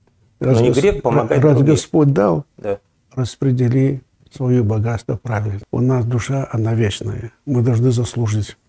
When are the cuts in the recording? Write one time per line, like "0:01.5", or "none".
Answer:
0:05.5

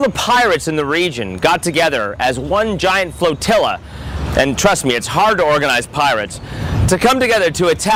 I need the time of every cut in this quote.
none

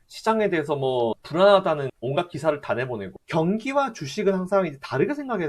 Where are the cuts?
0:03.2

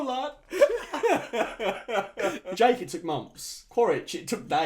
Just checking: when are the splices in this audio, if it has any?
0:02.4

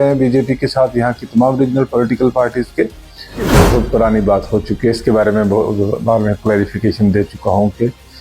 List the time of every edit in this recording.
0:03.5

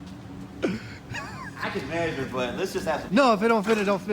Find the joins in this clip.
none

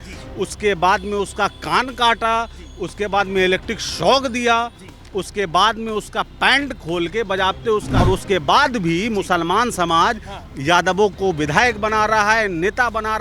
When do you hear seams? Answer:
0:07.9

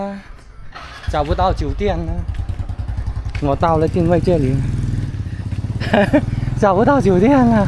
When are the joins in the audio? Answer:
none

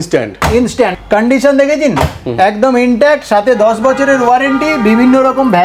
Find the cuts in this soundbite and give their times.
0:00.9

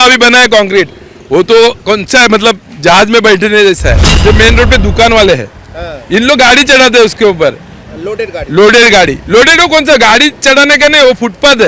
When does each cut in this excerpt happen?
0:04.1

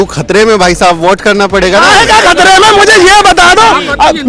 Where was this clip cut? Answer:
none

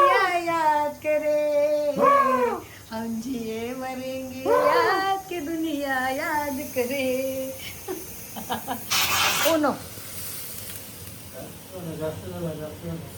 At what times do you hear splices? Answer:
0:08.9

